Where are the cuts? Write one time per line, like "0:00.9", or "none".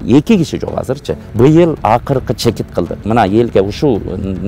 0:01.2